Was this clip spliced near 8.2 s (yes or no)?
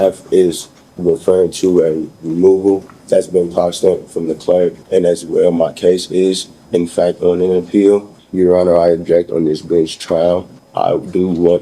yes